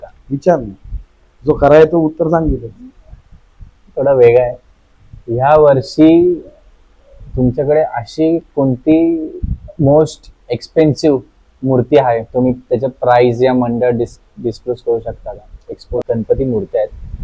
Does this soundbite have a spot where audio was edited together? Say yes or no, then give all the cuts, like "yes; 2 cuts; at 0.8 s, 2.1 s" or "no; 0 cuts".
yes; 1 cut; at 16.0 s